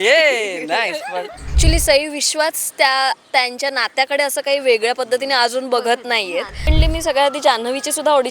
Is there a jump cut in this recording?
yes; 2 cuts; at 1.5 s, 6.7 s

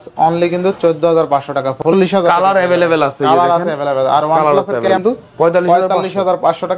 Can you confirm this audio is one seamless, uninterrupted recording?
no; 2 cuts; at 1.8 s, 4.9 s

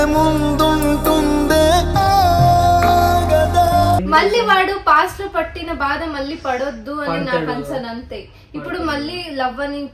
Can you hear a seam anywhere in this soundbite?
yes; 1 cut; at 4.0 s

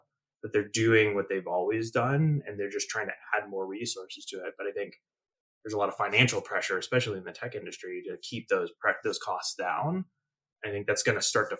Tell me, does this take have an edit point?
no; 0 cuts

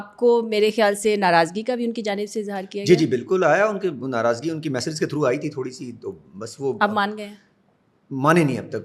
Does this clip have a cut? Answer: no; 0 cuts

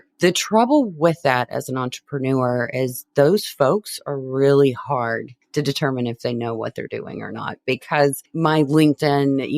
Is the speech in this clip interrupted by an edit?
yes; 2 cuts; at 5.3 s, 8.2 s

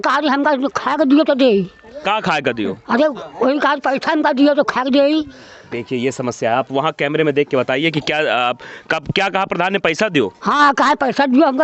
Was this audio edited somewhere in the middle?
no; 0 cuts

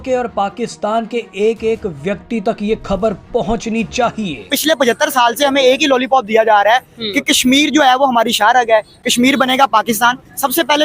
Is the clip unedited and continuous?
no; 1 cut; at 4.4 s

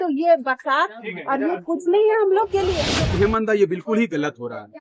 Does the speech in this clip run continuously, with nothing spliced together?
no; 1 cut; at 2.8 s

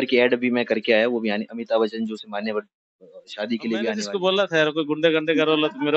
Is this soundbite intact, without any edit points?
no; 1 cut; at 4.0 s

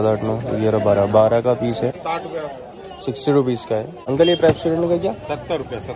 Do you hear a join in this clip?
yes; 2 cuts; at 2.0 s, 4.0 s

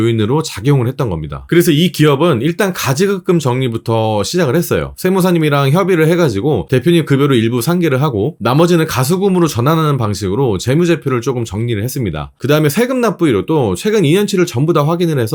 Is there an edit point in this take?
no; 0 cuts

